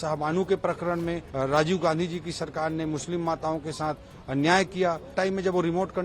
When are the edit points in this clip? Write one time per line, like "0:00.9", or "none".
0:01.2
0:05.2